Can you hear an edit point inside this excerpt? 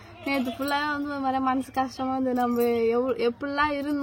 no; 0 cuts

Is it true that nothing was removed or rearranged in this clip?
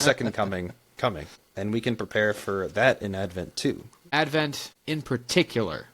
no; 3 cuts; at 1.5 s, 4.1 s, 4.7 s

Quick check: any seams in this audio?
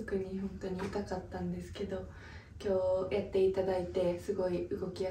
no; 0 cuts

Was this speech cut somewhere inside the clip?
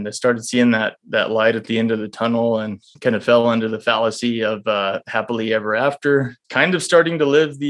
yes; 2 cuts; at 2.9 s, 6.4 s

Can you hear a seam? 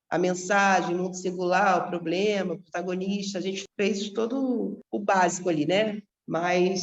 no; 0 cuts

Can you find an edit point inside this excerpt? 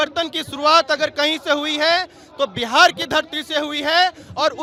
no; 0 cuts

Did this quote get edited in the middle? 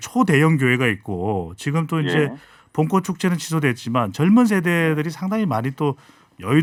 no; 0 cuts

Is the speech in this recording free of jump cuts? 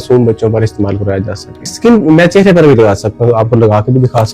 no; 1 cut; at 1.7 s

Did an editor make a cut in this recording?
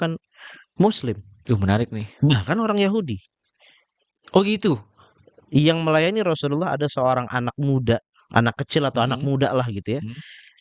no; 0 cuts

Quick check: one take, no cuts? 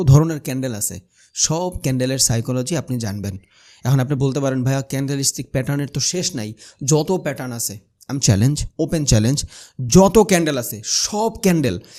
yes; 0 cuts

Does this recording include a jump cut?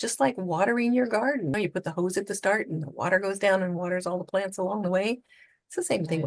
yes; 1 cut; at 1.5 s

